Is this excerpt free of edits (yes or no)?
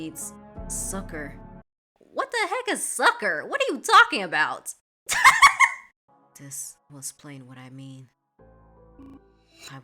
no